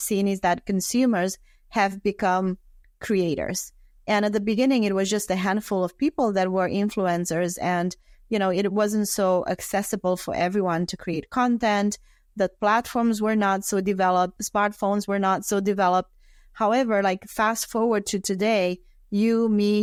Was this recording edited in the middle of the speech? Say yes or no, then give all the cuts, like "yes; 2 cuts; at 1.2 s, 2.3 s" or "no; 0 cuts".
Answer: no; 0 cuts